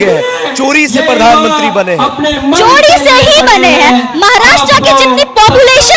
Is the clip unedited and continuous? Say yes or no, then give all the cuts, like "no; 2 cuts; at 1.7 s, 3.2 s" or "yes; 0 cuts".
yes; 0 cuts